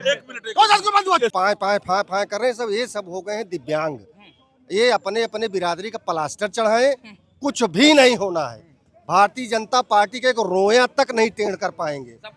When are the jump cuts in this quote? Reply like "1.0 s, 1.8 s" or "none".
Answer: 1.3 s